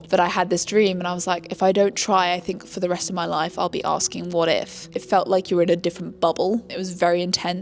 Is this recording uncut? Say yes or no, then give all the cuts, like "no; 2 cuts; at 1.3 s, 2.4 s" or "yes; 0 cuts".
no; 1 cut; at 4.8 s